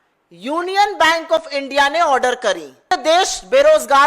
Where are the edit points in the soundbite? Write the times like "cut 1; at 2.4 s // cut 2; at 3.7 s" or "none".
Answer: cut 1; at 2.8 s